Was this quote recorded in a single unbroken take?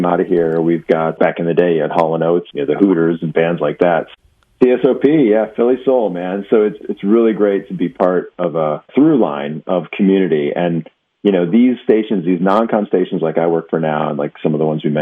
no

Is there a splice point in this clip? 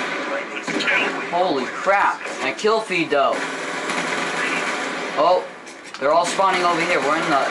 no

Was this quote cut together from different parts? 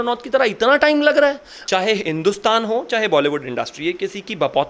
yes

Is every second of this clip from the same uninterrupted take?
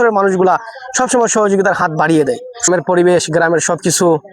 no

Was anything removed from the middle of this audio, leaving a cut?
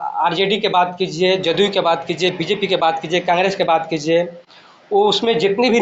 no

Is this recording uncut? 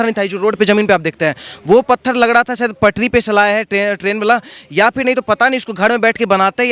yes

